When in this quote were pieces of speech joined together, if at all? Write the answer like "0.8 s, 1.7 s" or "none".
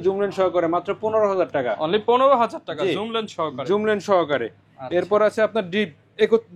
none